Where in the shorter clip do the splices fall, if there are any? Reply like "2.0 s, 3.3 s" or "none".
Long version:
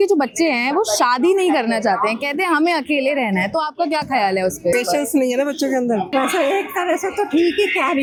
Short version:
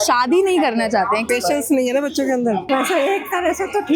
1.3 s

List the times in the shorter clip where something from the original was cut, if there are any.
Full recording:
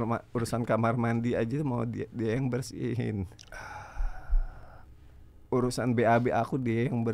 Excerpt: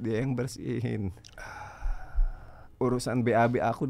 2.6 s

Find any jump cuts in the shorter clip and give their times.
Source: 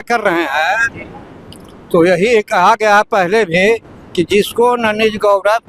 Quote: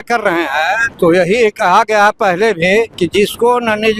0.9 s, 2.9 s

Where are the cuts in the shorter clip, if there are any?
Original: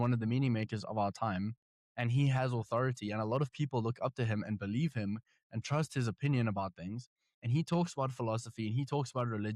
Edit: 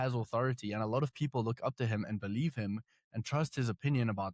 none

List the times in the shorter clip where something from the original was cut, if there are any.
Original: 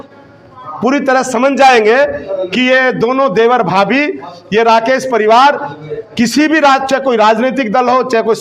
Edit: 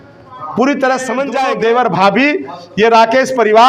1.4 s

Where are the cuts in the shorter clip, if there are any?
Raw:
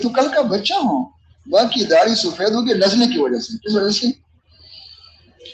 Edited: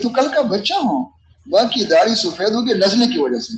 none

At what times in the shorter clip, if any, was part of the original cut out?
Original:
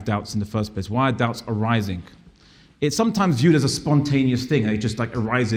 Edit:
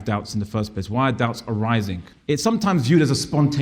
2.1 s

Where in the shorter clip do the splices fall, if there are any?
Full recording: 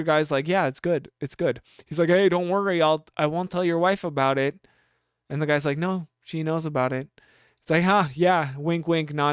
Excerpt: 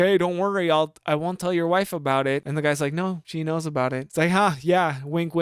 2.5 s, 3.5 s

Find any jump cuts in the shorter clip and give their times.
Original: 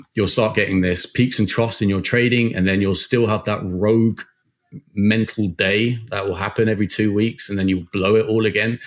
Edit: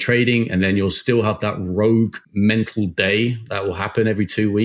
2.2 s

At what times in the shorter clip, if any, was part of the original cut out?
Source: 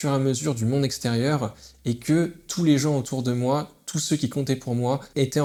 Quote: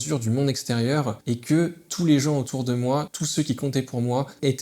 1.2 s, 3.2 s

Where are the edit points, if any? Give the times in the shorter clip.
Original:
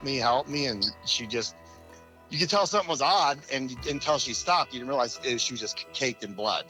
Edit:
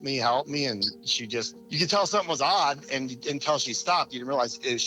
1.6 s

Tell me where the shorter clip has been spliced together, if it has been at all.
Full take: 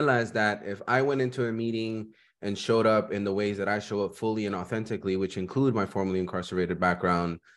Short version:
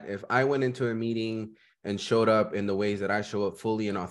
none

